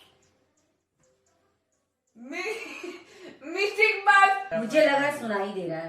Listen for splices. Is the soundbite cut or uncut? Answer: cut